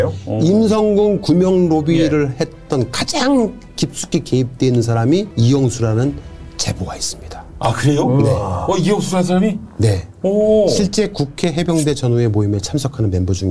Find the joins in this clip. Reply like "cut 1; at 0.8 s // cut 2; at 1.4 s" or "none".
cut 1; at 5.3 s